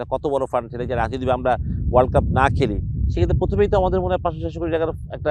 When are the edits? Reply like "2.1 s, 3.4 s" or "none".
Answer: none